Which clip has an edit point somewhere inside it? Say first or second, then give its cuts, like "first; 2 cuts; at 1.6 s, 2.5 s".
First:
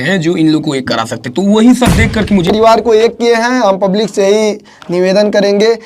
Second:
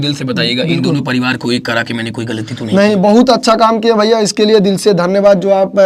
first; 1 cut; at 2.5 s